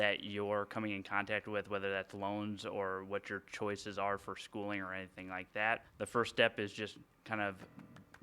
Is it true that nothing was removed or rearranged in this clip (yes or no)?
no